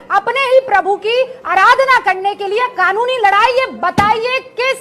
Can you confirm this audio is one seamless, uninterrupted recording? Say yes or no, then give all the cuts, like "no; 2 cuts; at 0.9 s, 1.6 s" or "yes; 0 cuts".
yes; 0 cuts